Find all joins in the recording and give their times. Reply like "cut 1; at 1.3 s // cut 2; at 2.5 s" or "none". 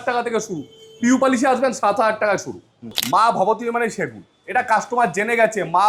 cut 1; at 3.0 s